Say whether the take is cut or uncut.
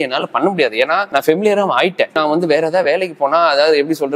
cut